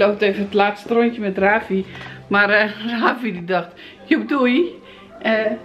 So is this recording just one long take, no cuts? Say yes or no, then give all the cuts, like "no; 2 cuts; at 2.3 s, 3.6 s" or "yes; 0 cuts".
yes; 0 cuts